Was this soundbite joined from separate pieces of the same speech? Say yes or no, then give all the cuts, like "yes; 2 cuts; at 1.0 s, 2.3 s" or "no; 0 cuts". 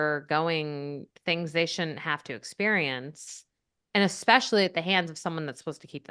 no; 0 cuts